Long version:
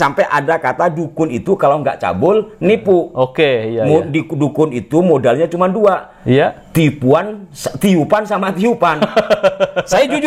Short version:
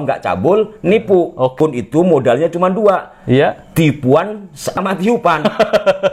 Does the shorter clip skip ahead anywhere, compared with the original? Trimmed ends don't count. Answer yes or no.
yes